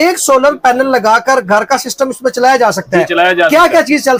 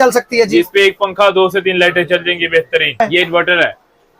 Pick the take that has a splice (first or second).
second